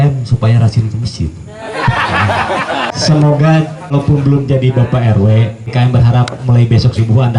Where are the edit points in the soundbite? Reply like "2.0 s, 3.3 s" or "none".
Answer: 2.9 s, 3.9 s, 5.7 s